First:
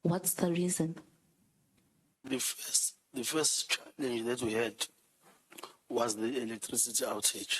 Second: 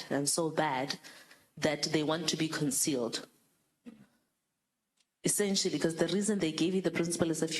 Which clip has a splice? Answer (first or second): first